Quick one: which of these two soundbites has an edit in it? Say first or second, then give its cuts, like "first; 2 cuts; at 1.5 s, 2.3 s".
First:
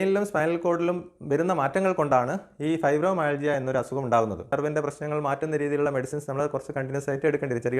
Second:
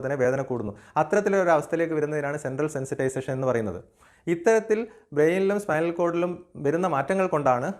first; 1 cut; at 4.5 s